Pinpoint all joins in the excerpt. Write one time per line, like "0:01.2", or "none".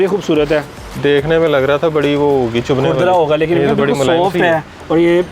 0:00.9